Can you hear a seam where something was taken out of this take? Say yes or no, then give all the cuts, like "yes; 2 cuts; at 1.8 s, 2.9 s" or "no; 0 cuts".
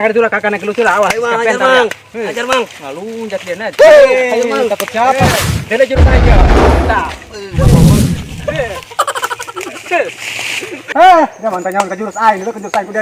no; 0 cuts